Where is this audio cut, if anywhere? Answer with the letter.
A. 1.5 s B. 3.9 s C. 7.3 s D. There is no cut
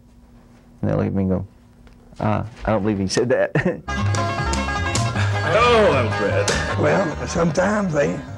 B